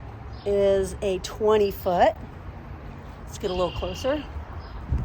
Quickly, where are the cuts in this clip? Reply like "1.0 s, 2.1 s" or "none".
none